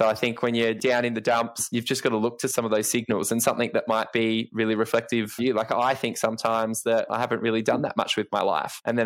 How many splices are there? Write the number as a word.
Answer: four